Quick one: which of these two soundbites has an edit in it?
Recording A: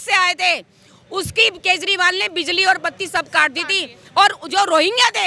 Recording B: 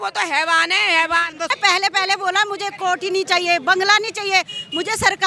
B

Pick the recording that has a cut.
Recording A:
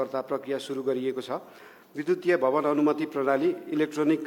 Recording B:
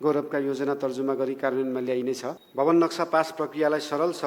B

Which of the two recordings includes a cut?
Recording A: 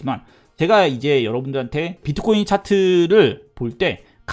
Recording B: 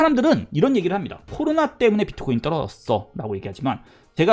A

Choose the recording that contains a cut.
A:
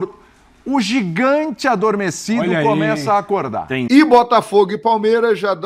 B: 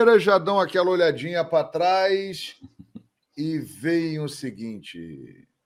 A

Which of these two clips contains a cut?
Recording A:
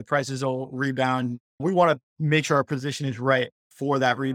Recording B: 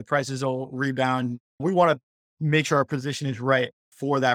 A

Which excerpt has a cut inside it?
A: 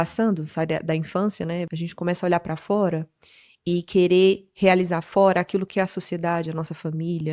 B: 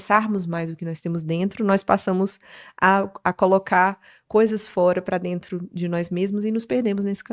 A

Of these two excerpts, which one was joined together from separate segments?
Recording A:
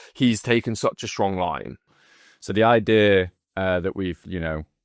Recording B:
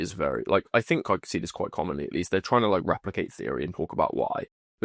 A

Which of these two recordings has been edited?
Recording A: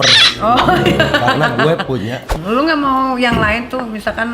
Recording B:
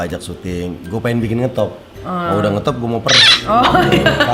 A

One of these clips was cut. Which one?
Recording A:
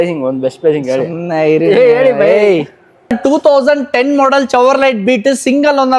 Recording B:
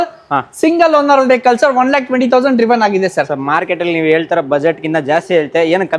A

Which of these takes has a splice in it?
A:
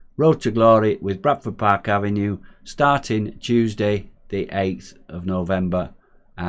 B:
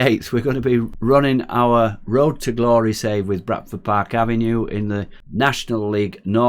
B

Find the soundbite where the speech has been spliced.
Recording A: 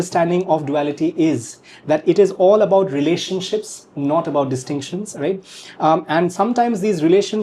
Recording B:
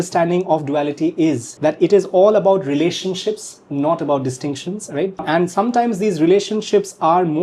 B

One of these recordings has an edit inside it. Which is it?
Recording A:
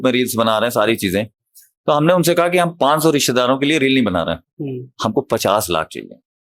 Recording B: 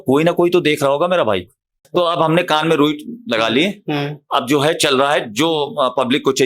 B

